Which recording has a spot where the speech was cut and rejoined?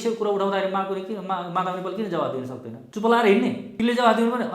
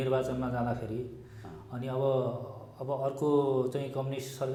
first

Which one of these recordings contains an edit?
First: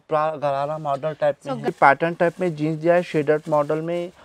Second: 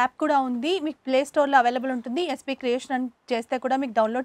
first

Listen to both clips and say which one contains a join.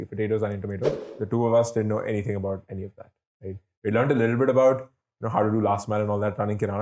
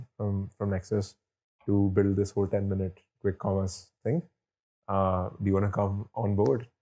first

